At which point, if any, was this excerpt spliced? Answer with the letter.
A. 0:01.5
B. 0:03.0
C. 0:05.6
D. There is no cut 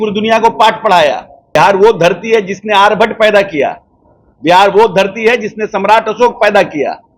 A